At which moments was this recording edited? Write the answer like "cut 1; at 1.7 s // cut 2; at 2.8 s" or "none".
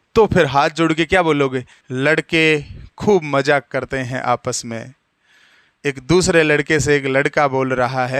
cut 1; at 1.7 s